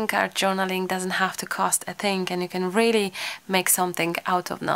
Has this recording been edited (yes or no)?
no